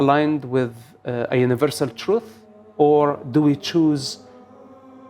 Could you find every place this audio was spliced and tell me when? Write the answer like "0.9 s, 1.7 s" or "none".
none